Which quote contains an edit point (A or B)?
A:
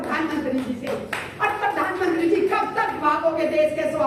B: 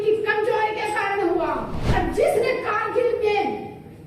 B